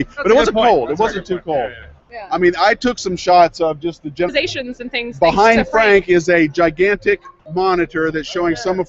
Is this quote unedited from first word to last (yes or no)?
yes